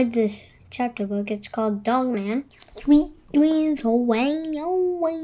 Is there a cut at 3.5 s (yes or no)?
no